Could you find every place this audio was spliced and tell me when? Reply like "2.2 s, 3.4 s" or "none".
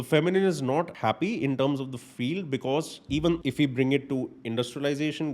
0.9 s, 3.4 s